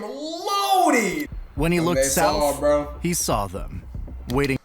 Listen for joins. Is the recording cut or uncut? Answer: cut